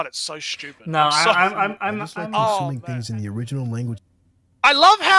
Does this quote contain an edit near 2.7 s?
yes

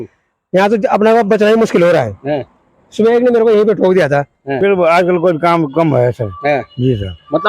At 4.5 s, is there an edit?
yes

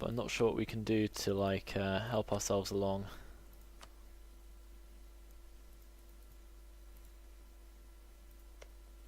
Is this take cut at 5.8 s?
no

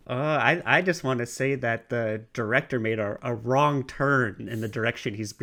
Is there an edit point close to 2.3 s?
no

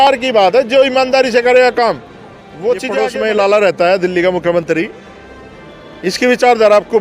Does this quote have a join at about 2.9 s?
yes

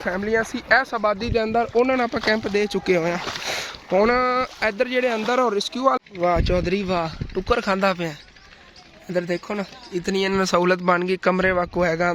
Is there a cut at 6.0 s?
yes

